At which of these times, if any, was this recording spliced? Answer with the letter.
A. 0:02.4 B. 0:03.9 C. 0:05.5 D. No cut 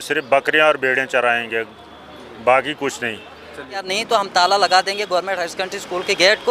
B